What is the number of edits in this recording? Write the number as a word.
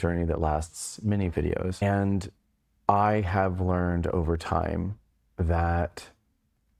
one